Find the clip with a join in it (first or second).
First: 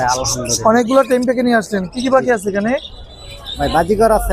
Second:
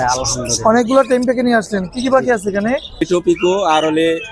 second